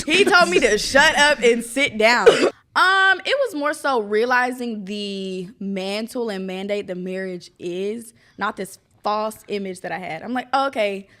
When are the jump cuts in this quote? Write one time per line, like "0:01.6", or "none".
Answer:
0:02.6